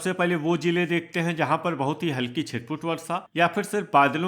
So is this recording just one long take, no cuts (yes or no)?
yes